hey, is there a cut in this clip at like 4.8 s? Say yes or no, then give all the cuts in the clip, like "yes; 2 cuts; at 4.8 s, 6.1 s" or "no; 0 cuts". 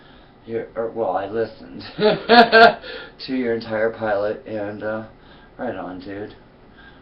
no; 1 cut; at 2.2 s